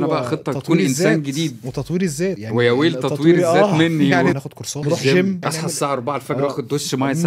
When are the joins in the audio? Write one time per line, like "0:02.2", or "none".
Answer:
0:02.4
0:04.4
0:05.4